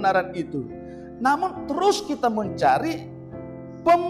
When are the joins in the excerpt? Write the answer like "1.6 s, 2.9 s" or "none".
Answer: none

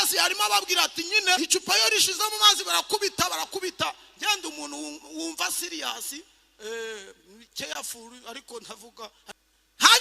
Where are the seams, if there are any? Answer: 1.4 s, 9.2 s

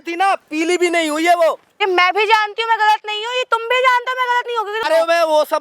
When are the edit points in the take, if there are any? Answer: 1.8 s, 4.8 s

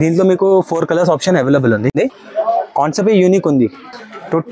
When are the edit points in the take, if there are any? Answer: 1.9 s

